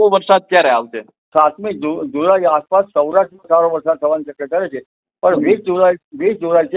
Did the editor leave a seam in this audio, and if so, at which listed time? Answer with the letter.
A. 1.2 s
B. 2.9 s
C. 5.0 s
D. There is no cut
A